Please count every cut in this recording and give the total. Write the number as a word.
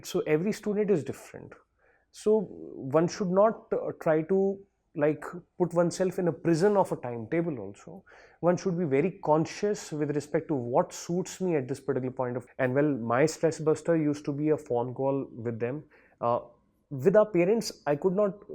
one